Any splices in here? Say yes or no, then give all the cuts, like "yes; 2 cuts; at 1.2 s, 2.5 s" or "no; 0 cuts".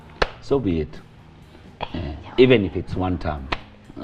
no; 0 cuts